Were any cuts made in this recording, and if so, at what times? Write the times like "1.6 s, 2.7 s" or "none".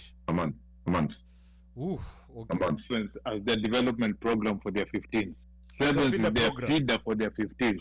2.9 s